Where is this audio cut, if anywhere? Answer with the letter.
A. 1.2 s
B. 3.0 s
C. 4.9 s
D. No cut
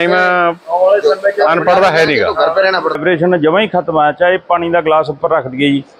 B